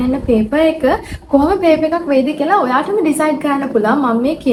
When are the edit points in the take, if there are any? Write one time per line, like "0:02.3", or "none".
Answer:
none